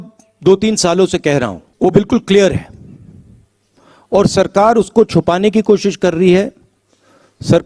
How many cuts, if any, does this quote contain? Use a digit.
1